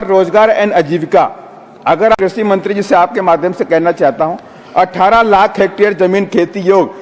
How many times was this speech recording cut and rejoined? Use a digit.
1